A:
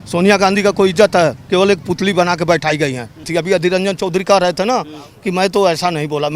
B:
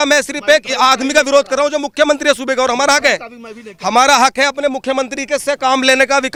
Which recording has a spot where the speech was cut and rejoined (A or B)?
A